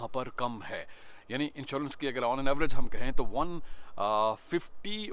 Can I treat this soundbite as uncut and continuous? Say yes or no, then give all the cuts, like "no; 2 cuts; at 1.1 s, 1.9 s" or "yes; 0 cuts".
yes; 0 cuts